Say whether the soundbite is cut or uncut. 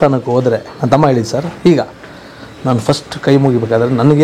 uncut